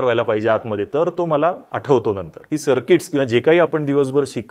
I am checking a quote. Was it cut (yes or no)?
yes